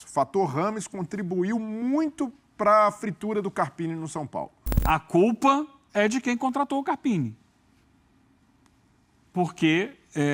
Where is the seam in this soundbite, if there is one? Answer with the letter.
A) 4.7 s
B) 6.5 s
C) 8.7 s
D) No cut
A